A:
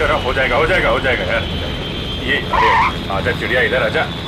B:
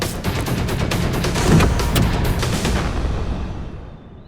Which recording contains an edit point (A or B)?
B